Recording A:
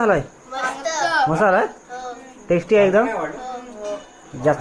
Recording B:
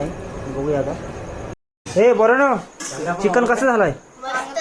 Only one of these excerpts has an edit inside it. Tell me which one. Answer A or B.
B